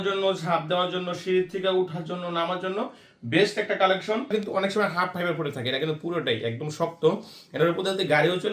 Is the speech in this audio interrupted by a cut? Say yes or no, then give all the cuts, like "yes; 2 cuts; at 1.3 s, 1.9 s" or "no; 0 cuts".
yes; 1 cut; at 4.3 s